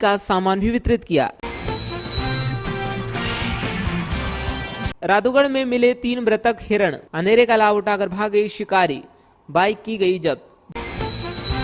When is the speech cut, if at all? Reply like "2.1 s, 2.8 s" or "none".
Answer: 1.3 s, 4.9 s, 10.6 s